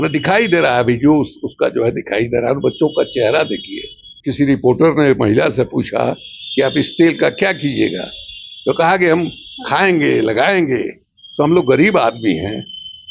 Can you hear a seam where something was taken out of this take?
yes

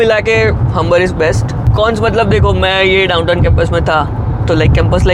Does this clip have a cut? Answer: yes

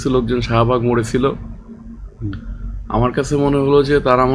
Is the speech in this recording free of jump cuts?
yes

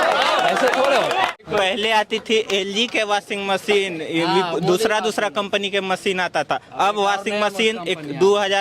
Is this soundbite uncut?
no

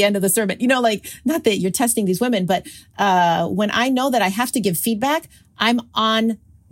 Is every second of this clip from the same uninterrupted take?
yes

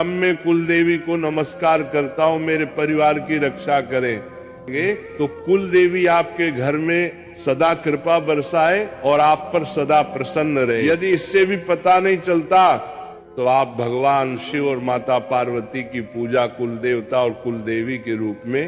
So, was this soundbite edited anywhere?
yes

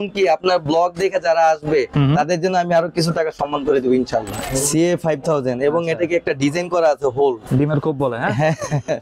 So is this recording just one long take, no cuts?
no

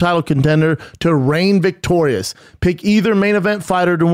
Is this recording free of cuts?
yes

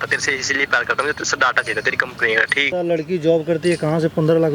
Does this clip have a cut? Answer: yes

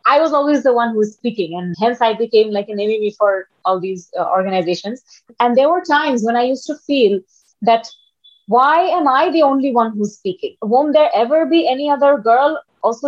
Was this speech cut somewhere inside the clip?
yes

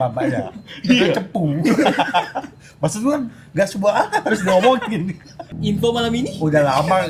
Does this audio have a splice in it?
yes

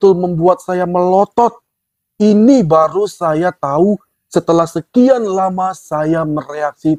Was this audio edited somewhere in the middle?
no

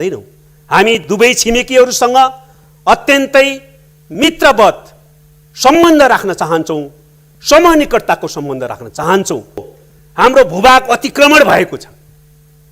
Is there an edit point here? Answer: yes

